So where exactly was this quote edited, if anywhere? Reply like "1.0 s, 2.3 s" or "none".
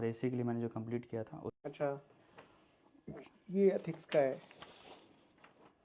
1.6 s